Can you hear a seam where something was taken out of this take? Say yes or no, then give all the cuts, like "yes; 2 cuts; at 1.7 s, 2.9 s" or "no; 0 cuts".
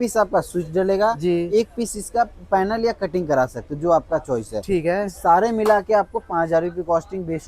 no; 0 cuts